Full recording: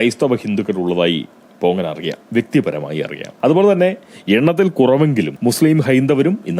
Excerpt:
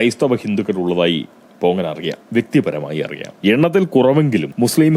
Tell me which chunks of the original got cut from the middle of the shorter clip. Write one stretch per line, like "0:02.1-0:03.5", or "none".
0:03.2-0:04.1